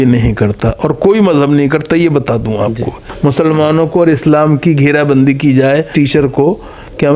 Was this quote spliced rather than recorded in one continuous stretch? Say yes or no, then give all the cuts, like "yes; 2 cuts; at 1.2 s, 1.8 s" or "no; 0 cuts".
yes; 2 cuts; at 3.0 s, 5.9 s